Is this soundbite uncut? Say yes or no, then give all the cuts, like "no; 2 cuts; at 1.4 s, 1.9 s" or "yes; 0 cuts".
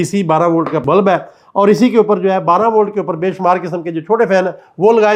yes; 0 cuts